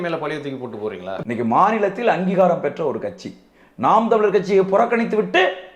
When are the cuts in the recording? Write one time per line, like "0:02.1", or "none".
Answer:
0:01.1